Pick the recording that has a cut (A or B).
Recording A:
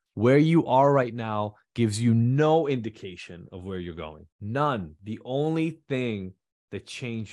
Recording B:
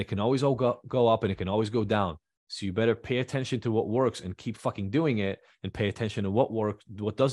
A